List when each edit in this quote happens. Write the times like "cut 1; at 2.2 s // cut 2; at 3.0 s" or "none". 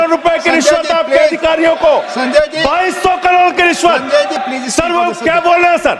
none